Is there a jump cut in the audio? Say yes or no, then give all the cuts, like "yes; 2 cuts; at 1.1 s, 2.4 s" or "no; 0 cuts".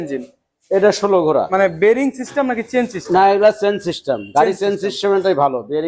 yes; 1 cut; at 1.5 s